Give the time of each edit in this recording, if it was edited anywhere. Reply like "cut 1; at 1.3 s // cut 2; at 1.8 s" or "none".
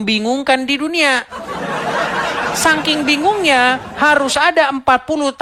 none